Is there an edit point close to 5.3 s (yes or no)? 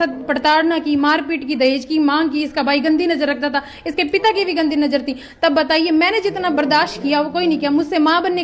no